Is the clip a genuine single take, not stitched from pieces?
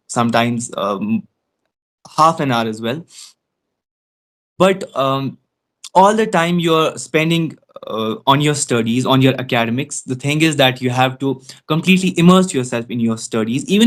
yes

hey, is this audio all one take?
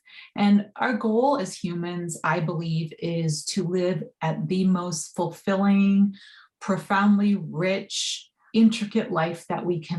no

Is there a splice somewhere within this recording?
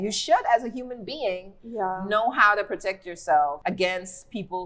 yes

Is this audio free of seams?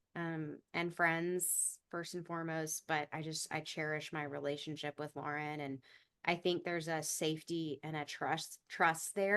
yes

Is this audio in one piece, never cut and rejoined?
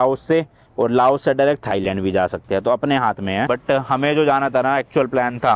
yes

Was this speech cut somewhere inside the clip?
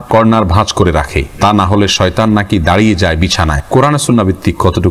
yes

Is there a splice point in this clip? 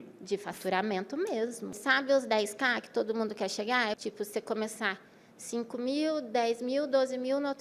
yes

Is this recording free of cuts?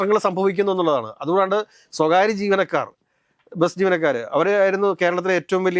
yes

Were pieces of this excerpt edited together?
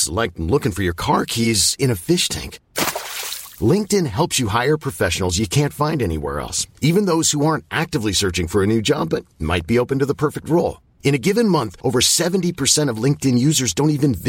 no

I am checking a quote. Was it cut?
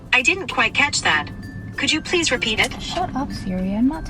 no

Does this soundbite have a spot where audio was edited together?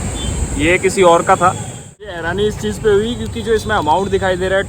yes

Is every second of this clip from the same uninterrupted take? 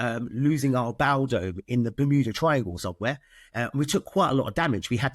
yes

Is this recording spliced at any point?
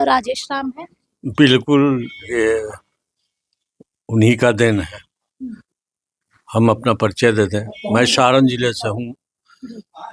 no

